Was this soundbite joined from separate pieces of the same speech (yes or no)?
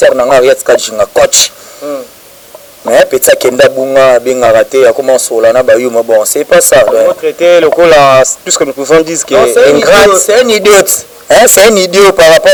no